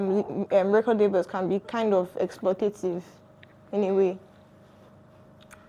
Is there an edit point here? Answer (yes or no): no